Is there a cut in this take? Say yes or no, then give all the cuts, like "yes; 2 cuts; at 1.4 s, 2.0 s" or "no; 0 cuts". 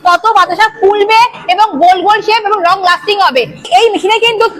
yes; 1 cut; at 3.7 s